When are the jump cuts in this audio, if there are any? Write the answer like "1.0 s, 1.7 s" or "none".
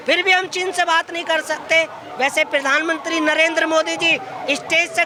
none